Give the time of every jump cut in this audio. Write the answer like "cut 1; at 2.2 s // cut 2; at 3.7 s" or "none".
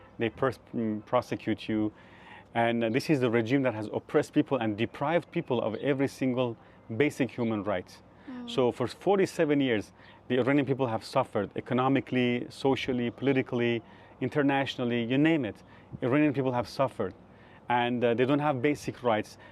none